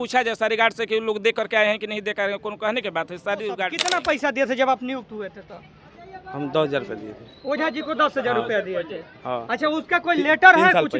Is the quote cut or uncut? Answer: cut